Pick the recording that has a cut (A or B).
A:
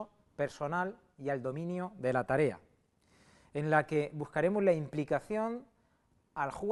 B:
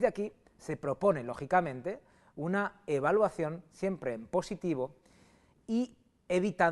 B